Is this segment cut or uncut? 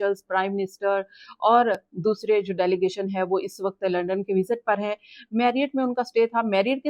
uncut